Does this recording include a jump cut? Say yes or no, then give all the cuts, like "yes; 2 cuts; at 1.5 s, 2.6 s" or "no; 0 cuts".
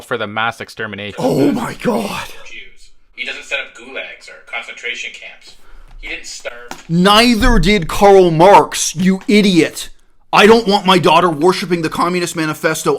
no; 0 cuts